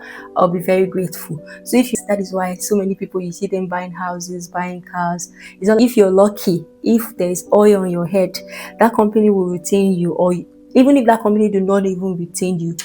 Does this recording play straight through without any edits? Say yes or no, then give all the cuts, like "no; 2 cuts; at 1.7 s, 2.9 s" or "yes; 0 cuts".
no; 2 cuts; at 2.0 s, 5.8 s